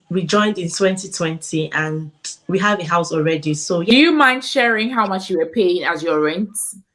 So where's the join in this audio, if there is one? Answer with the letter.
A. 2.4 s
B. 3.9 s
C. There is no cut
B